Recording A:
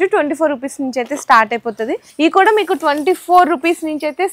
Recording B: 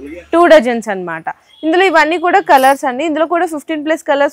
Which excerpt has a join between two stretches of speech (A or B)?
A